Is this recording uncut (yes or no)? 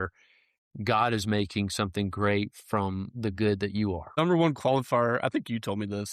no